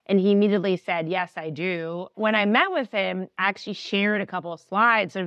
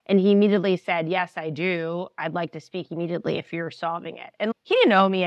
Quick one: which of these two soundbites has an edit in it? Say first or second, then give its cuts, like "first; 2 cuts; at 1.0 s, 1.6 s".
first; 1 cut; at 2.1 s